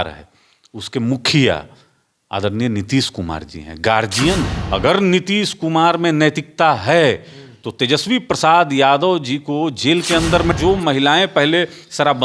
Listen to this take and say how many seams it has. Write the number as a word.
two